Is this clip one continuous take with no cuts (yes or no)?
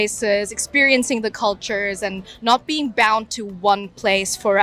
yes